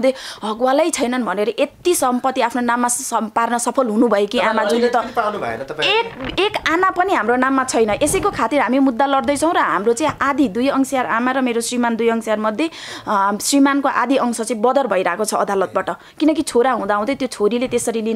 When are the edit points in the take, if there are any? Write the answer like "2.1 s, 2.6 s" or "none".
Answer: none